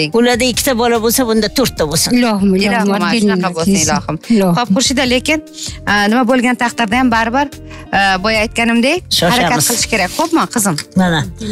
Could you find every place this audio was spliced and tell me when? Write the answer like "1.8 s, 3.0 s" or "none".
none